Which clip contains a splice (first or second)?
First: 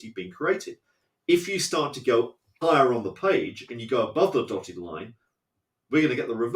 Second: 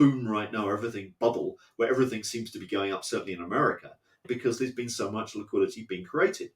second